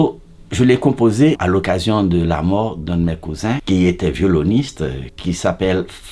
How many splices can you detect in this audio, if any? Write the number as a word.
three